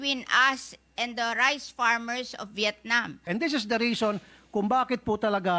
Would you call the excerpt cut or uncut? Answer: cut